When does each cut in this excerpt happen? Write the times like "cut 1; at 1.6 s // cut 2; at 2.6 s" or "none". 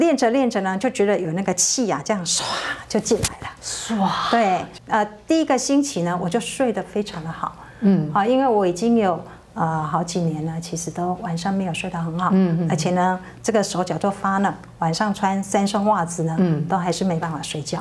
none